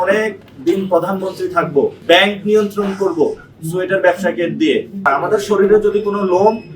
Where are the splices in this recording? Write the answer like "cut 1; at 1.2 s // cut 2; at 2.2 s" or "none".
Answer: cut 1; at 2.0 s // cut 2; at 5.1 s